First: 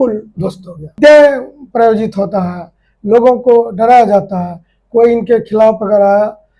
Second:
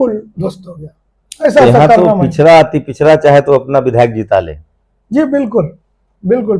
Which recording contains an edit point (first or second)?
first